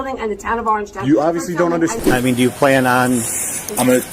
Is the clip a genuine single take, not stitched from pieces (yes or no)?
no